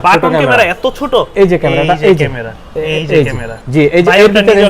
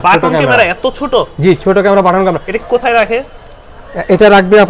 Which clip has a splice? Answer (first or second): first